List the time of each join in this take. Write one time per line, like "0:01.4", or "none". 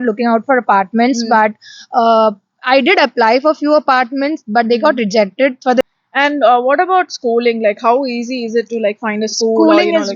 0:05.8